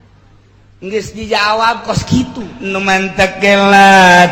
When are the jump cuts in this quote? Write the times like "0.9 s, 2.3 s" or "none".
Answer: 2.5 s

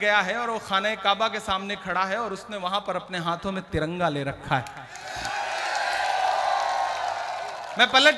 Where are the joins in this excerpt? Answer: none

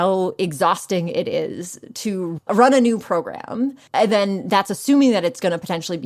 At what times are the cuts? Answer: 2.4 s, 3.8 s

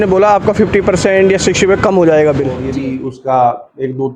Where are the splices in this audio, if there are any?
2.6 s

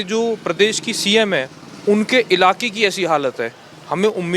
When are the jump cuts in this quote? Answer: none

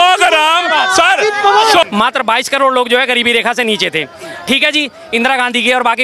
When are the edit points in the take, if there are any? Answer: 1.8 s

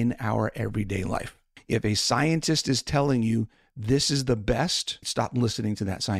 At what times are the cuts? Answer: 5.0 s

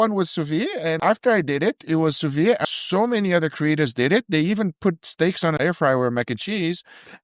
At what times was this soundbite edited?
1.0 s, 2.6 s, 5.6 s

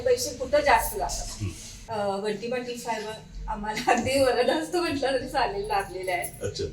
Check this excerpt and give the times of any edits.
1.9 s

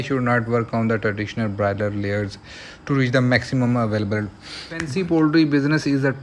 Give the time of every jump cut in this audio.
4.9 s

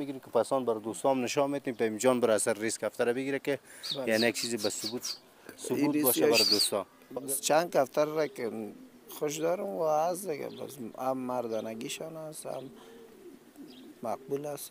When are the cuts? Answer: 7.3 s

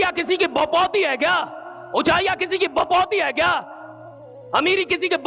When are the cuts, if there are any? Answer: none

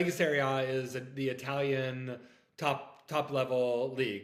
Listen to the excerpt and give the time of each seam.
none

